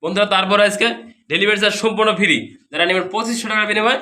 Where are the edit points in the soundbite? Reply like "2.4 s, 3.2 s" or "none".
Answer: none